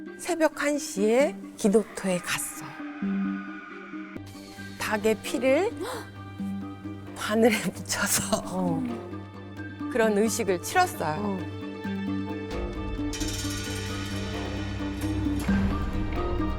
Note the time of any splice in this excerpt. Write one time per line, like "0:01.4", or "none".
0:04.2